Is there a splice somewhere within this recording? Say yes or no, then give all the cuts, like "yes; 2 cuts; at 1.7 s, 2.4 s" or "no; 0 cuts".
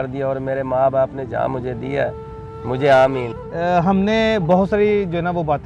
no; 0 cuts